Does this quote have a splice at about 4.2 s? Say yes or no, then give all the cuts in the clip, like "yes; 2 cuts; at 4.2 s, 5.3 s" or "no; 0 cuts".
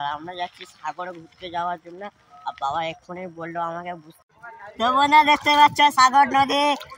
yes; 1 cut; at 4.2 s